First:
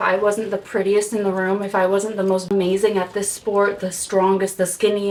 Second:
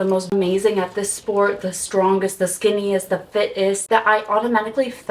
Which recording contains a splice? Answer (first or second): second